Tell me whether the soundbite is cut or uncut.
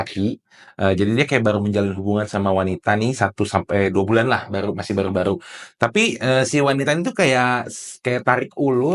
uncut